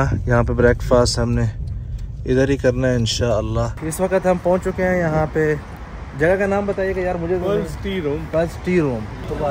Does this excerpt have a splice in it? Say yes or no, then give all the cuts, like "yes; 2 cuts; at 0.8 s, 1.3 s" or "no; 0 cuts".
no; 0 cuts